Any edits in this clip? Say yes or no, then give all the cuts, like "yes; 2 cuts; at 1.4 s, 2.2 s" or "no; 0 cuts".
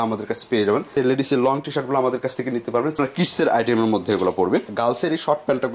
yes; 3 cuts; at 0.9 s, 2.9 s, 4.7 s